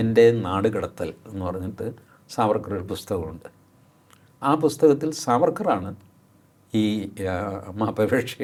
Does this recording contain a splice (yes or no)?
no